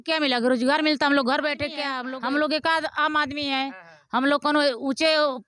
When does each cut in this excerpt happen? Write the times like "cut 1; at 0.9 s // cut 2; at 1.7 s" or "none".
cut 1; at 1.9 s